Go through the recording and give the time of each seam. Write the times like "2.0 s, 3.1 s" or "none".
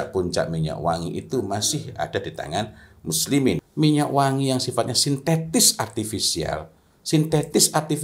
3.7 s

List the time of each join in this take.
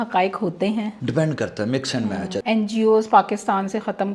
1.0 s, 2.4 s

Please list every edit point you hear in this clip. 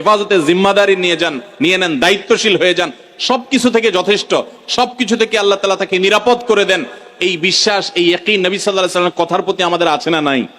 none

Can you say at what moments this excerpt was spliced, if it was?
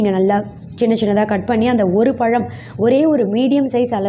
none

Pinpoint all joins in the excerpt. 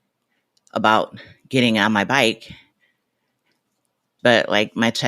4.1 s

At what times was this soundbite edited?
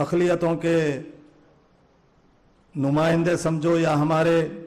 0.9 s

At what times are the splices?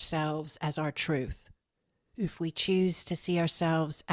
none

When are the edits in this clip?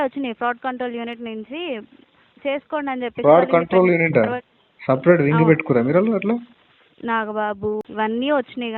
7.8 s

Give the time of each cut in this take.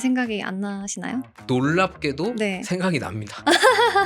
1.3 s

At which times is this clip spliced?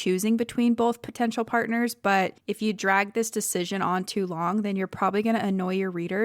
2.4 s

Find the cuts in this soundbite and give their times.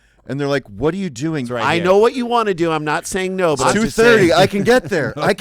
1.4 s

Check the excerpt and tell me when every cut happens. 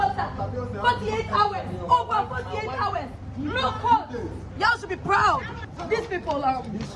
4.4 s, 5.7 s

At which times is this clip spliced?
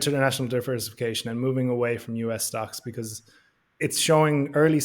3.8 s

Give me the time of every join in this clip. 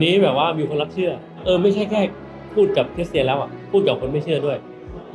1.4 s, 2.4 s

